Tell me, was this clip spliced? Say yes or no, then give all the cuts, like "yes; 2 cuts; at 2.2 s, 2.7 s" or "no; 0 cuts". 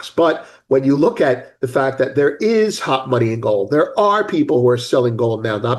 no; 0 cuts